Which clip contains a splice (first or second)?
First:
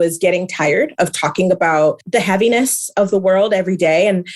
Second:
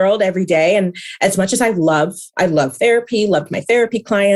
first